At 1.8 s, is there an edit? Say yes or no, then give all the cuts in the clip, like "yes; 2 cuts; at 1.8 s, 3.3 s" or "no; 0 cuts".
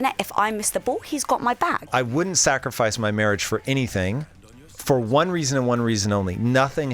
yes; 1 cut; at 1.8 s